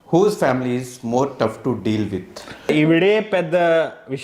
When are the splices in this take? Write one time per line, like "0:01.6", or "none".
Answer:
0:02.7

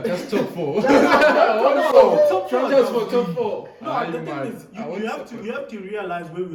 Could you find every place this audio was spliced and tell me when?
none

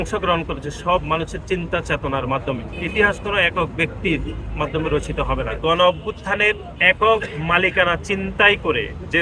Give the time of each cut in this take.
0:05.3

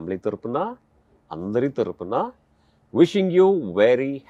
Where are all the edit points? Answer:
none

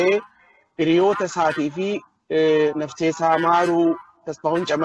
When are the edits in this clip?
none

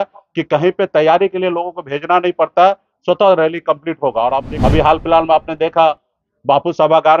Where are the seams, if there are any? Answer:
0:04.5

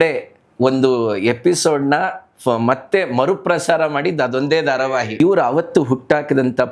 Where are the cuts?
0:05.2

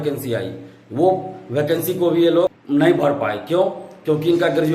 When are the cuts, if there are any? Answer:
0:02.6

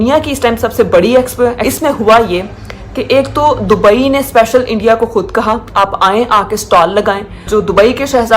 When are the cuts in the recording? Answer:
0:01.6
0:07.5

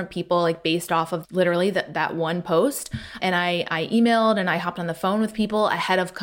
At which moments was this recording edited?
0:01.2
0:03.2

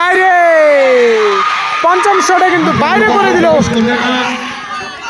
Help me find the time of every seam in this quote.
none

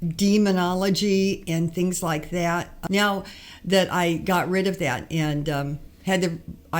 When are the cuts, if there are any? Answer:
0:02.8
0:05.8

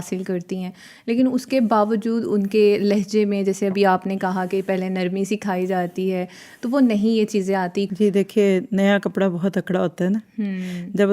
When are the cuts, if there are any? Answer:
0:07.9

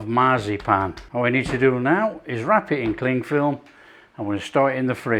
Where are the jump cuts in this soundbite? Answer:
0:01.0

